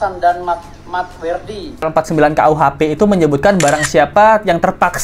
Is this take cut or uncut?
cut